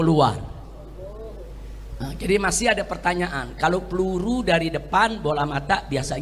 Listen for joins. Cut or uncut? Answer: uncut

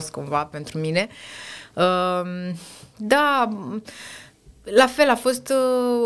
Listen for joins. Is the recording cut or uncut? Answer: uncut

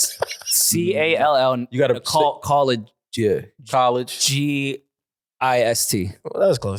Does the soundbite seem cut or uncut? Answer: uncut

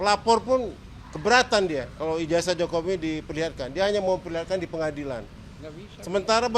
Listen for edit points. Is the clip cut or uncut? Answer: uncut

